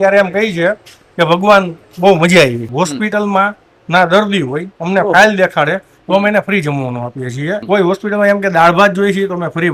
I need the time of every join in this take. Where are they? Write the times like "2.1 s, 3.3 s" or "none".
2.6 s, 7.6 s

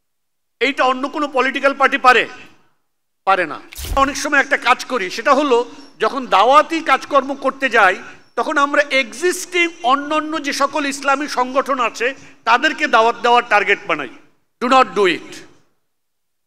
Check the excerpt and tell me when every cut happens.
4.0 s

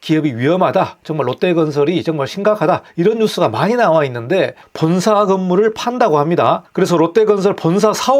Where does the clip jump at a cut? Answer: 2.9 s, 4.6 s

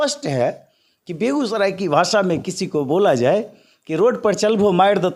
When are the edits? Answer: none

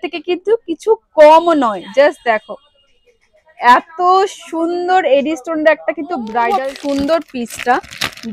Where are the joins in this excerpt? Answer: 6.5 s

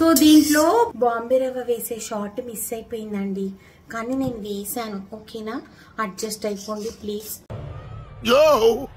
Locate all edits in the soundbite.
none

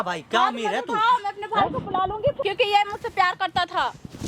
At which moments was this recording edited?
2.4 s

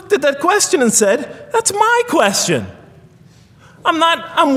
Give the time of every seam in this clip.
none

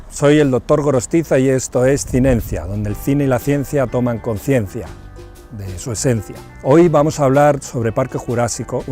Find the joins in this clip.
1.3 s

